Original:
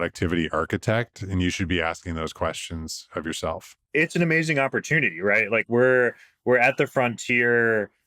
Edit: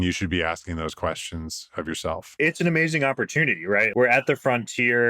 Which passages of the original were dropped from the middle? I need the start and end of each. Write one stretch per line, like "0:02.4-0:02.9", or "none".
0:03.7-0:03.8
0:05.4-0:06.4